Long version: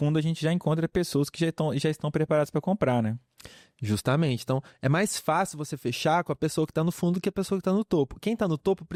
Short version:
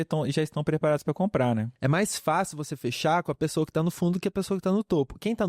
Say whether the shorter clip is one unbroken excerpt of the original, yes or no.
no